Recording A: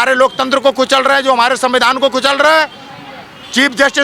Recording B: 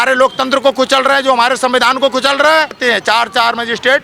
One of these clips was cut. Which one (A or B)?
B